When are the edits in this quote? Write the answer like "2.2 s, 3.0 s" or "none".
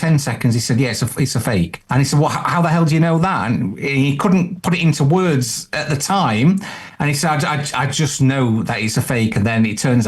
1.8 s